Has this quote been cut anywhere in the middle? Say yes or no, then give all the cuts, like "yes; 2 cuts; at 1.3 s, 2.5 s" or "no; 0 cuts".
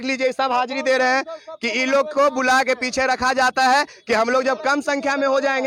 no; 0 cuts